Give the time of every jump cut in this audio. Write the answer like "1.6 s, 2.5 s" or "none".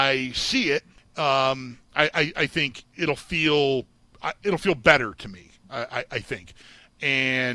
1.0 s, 2.8 s, 6.6 s